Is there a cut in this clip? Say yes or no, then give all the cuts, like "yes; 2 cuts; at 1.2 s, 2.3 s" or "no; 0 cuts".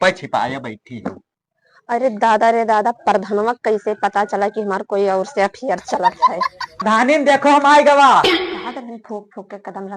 yes; 1 cut; at 6.8 s